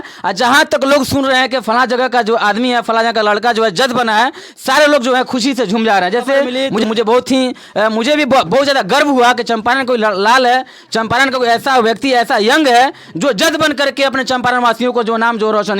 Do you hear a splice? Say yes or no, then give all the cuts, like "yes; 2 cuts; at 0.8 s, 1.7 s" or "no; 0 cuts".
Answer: yes; 1 cut; at 6.6 s